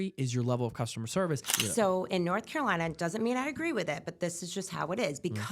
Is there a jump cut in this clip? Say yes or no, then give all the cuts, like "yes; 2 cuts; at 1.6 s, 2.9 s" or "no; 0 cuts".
yes; 1 cut; at 1.5 s